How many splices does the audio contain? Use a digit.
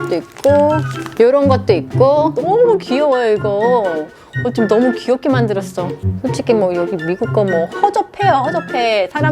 2